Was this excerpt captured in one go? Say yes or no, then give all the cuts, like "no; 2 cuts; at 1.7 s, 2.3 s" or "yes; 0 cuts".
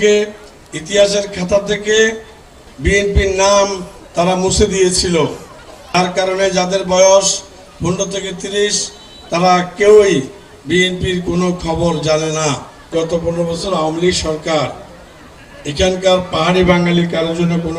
yes; 0 cuts